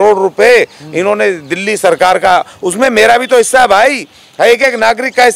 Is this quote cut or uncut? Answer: uncut